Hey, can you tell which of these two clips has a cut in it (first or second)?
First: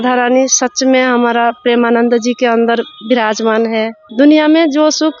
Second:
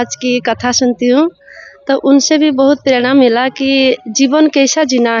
first